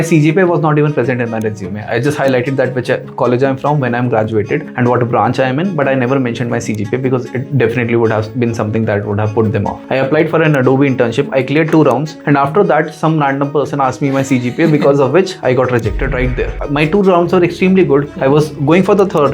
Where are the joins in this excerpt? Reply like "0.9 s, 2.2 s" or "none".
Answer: 9.8 s, 16.5 s